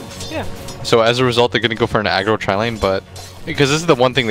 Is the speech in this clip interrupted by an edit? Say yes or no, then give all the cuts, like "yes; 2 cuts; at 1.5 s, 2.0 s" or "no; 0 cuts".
yes; 1 cut; at 2.7 s